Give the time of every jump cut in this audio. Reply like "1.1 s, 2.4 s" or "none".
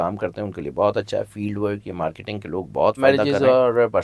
3.0 s